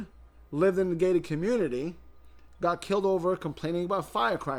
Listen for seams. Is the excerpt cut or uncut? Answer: uncut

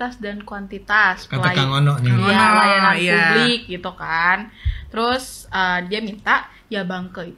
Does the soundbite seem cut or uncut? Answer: uncut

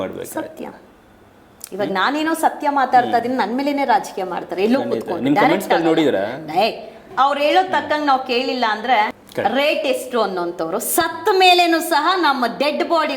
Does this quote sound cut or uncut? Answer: cut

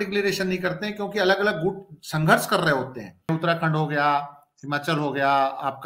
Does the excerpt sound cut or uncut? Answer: cut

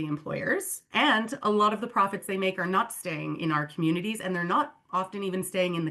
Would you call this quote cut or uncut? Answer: uncut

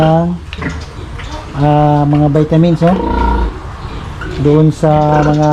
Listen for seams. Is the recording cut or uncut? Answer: uncut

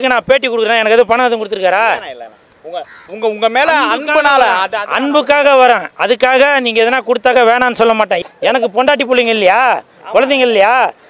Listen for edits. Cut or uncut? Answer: cut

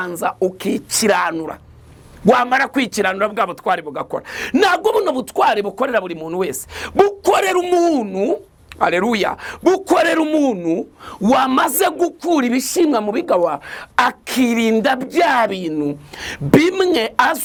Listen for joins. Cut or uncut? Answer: uncut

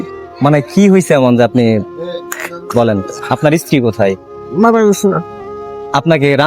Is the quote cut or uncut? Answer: cut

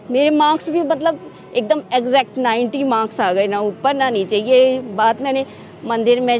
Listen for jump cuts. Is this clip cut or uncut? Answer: uncut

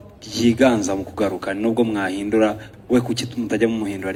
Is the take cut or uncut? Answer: uncut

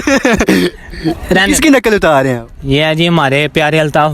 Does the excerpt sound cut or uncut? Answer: uncut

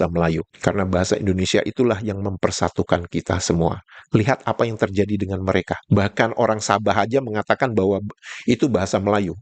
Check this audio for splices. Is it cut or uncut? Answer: uncut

